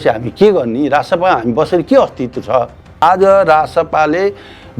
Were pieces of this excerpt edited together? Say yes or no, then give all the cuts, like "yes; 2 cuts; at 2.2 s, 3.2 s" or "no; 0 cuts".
yes; 1 cut; at 3.0 s